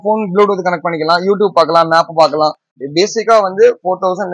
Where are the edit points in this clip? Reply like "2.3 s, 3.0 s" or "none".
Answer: 2.7 s